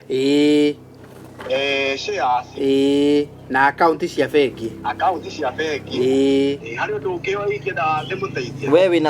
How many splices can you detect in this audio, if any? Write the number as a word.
one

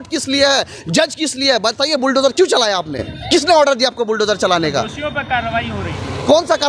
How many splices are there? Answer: zero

